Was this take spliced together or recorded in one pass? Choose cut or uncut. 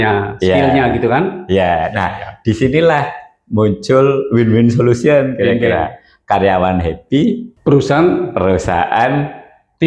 uncut